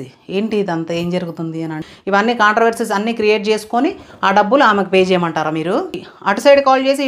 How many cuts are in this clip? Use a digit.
2